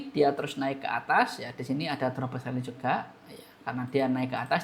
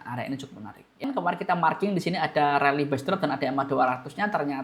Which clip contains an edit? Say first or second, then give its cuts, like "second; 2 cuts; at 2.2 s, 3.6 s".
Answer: second; 1 cut; at 1.0 s